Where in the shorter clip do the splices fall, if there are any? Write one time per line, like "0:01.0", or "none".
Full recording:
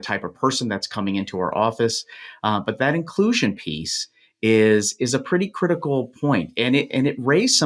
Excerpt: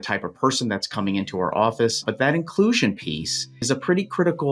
0:02.1
0:03.6

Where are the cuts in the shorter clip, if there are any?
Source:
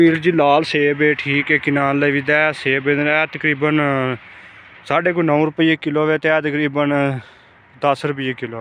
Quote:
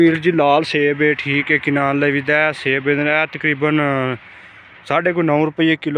none

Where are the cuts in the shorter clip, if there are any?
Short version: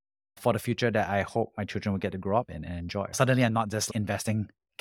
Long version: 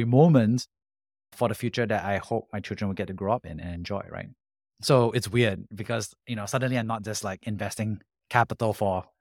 0:03.1
0:03.9

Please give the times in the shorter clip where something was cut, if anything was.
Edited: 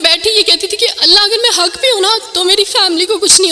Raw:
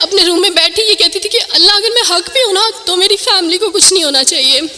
none

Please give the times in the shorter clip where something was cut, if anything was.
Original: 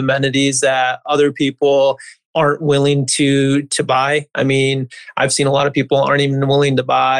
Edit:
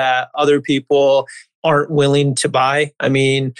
0:02.4

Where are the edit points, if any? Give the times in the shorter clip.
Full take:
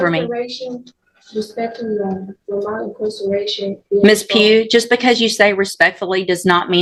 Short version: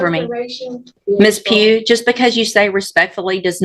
0:00.9

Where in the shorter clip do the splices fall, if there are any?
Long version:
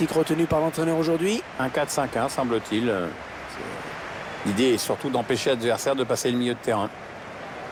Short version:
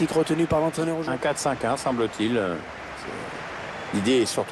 0:01.0

